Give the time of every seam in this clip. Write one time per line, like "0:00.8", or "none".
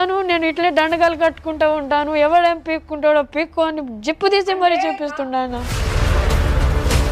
0:05.8